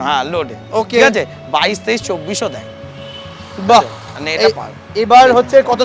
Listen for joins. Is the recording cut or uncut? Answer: uncut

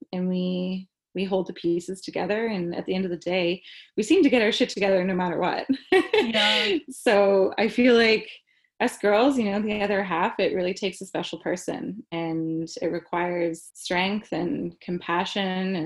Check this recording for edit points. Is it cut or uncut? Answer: cut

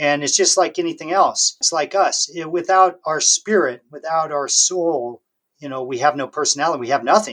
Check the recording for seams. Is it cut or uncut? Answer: cut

